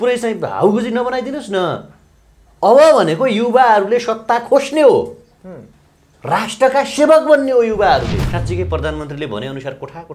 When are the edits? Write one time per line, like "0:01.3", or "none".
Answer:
0:08.3

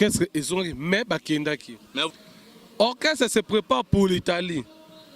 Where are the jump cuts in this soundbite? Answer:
0:02.1

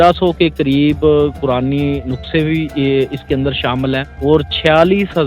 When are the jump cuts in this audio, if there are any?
0:04.1

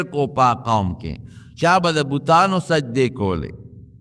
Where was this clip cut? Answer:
none

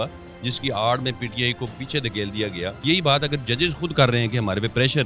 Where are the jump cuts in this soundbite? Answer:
0:02.8

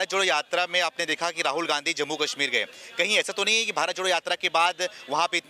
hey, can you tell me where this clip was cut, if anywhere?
none

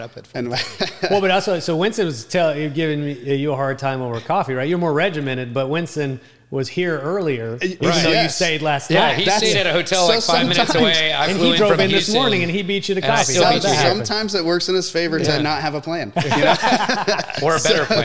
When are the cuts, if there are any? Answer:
none

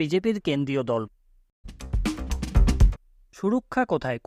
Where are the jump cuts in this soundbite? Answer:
0:01.1
0:03.2

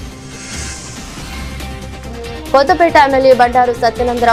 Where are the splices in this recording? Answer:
none

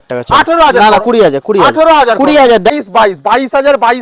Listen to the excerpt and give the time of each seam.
0:02.7

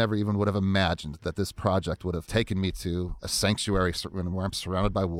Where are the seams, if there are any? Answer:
0:02.2
0:03.2

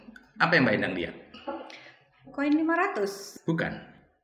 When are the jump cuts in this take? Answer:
0:03.2

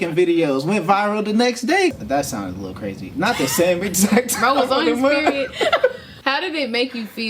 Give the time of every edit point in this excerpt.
0:02.0
0:06.1

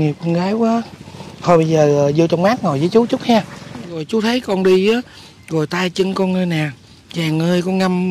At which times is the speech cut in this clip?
0:04.0

